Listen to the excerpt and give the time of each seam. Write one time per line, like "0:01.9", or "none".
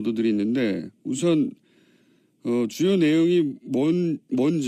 none